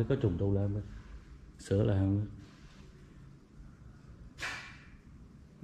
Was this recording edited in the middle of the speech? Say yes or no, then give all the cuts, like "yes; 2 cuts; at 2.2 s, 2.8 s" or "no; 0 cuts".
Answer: no; 0 cuts